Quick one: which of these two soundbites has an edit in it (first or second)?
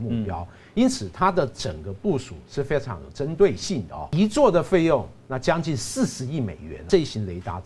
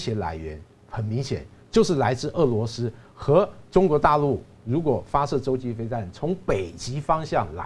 first